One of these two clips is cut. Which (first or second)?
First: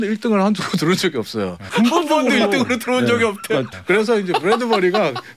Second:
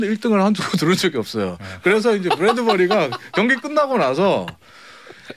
first